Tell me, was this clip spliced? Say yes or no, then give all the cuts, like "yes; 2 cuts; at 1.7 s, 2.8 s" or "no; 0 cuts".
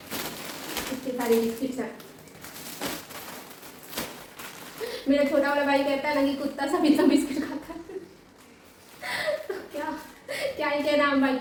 no; 0 cuts